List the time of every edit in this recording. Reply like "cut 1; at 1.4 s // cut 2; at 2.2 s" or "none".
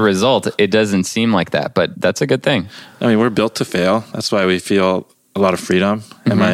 cut 1; at 1.9 s